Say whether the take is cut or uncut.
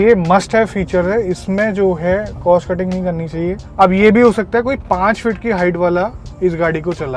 uncut